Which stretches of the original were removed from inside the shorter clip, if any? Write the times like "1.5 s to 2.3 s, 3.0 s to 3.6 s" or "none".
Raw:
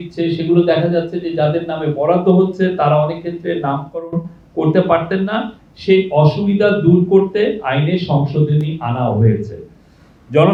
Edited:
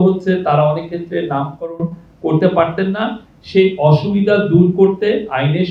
none